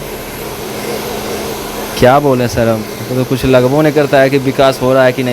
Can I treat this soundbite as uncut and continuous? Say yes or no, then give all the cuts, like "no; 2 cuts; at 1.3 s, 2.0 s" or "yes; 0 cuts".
yes; 0 cuts